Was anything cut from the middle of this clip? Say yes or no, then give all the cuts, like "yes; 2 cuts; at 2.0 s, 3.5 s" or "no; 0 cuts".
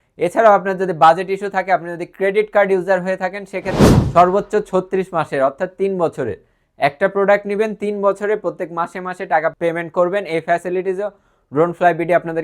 yes; 2 cuts; at 3.9 s, 9.5 s